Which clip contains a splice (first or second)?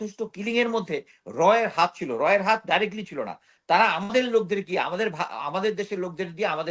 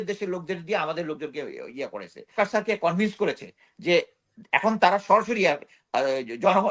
second